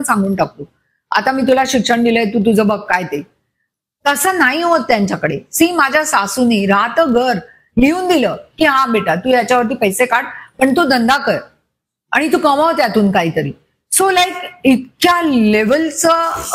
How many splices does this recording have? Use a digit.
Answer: 0